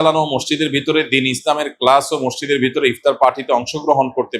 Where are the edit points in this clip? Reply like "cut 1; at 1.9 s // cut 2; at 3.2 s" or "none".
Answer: none

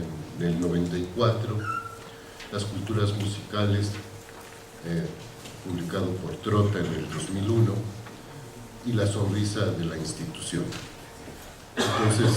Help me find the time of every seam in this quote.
cut 1; at 10.5 s

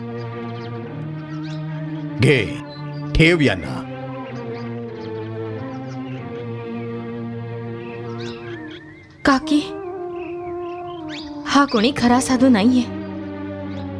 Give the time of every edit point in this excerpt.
cut 1; at 2.1 s // cut 2; at 8.4 s

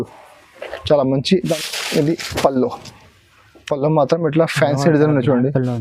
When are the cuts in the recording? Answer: cut 1; at 1.4 s

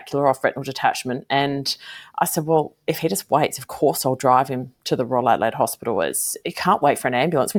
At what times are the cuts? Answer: none

